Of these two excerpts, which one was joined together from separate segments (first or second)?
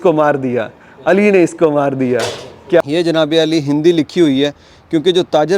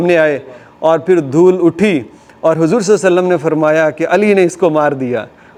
first